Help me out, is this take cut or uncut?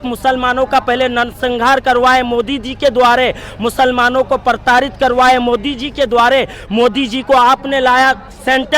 uncut